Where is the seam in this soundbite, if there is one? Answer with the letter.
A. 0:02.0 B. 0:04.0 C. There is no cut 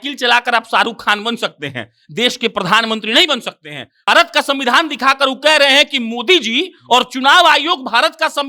B